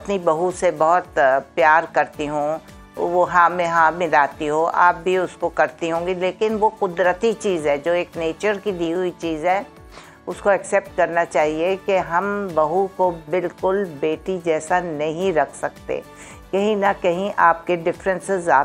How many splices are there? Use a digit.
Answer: 0